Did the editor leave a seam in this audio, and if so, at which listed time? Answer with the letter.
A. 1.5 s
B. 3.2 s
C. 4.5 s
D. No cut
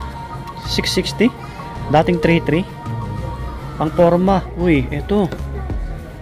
C